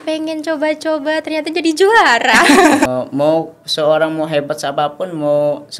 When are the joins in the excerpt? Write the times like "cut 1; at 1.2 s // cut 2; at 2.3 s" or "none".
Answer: cut 1; at 2.9 s